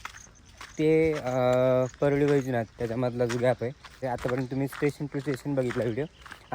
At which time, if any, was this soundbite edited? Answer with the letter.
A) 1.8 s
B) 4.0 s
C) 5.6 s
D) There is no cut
B